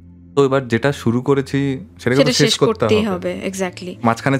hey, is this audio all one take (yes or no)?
yes